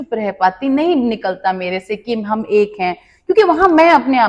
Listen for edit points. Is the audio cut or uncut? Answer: uncut